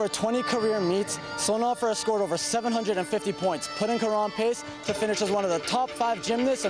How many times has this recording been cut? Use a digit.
0